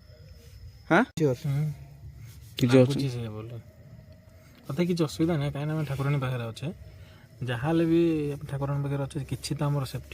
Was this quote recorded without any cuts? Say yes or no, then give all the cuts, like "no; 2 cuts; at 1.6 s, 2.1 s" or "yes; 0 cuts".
no; 1 cut; at 1.2 s